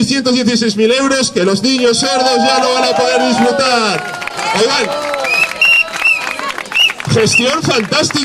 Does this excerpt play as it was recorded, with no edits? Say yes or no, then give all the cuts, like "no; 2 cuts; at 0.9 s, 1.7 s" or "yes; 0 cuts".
yes; 0 cuts